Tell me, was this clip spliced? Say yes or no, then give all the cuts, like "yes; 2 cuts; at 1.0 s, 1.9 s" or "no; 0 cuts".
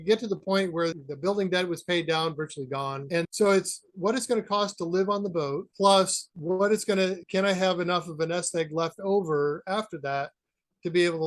no; 0 cuts